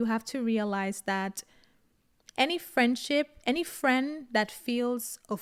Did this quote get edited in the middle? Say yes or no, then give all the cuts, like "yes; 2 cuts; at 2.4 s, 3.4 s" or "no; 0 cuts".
no; 0 cuts